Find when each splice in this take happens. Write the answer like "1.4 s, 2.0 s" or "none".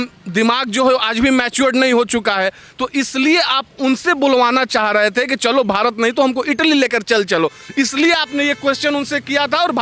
none